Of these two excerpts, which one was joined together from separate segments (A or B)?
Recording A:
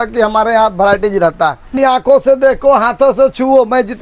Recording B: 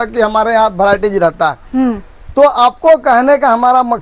A